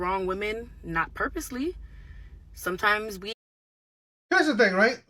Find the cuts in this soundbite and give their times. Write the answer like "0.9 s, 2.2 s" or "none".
none